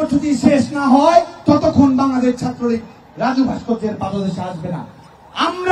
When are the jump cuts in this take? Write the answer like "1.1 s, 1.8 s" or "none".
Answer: 1.4 s